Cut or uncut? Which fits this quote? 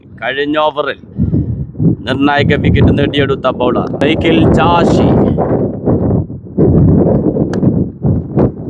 cut